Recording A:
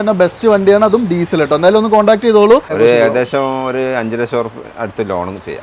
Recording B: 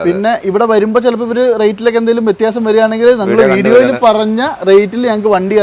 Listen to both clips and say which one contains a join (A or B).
A